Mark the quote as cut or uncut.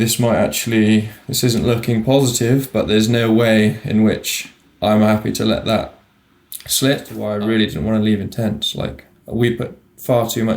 cut